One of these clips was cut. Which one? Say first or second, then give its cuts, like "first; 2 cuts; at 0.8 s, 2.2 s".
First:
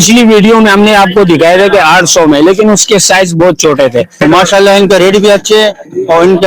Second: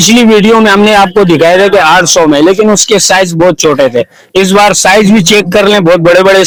first; 1 cut; at 4.2 s